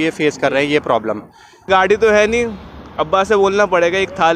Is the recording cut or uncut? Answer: cut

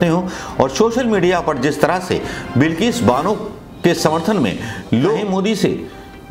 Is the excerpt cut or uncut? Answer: cut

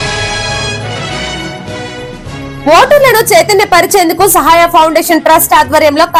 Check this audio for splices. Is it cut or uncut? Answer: uncut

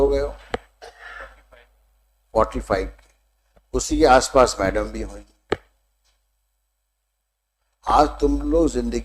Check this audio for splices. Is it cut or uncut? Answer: uncut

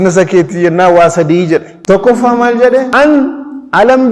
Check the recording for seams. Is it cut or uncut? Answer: cut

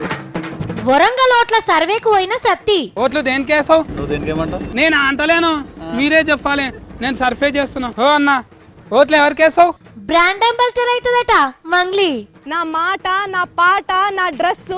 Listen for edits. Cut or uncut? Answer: uncut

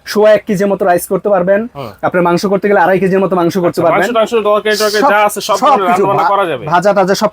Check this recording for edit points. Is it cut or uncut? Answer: uncut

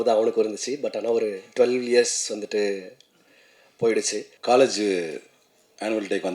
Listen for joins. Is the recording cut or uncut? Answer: cut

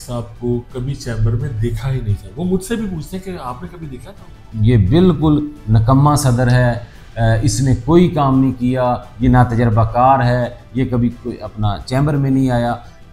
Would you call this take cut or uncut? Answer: cut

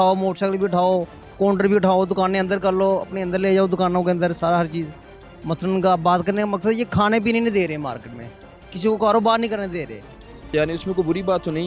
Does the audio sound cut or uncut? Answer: cut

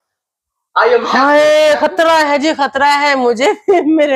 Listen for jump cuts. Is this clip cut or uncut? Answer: uncut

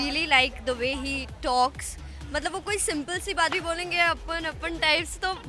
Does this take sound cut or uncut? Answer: uncut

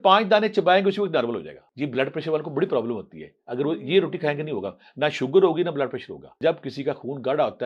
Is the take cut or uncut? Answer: cut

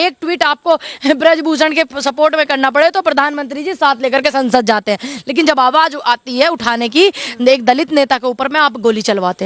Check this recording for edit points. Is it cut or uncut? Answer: uncut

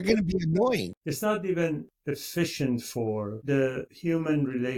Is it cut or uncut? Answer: cut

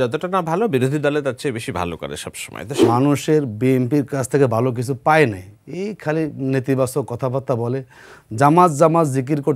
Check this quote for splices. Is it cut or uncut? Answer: cut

